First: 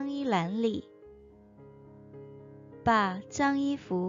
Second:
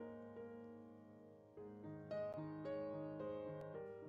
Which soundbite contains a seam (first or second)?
first